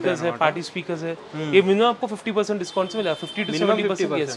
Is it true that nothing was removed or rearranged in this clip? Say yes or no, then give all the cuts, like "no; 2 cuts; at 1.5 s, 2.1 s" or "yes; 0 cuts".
yes; 0 cuts